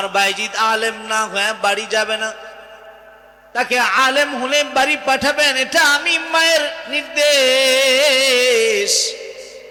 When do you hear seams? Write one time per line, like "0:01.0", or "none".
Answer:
none